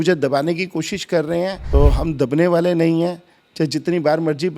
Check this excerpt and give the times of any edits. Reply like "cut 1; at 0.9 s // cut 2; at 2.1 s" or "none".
cut 1; at 1.6 s